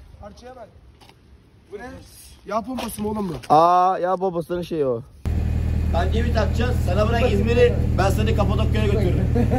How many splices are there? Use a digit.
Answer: 1